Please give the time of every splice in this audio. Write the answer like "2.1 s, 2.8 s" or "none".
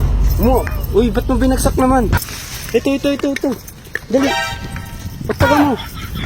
2.1 s